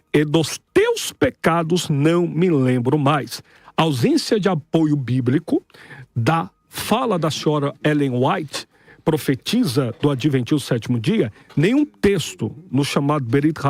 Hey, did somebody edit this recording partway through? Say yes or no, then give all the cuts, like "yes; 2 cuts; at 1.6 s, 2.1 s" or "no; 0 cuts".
no; 0 cuts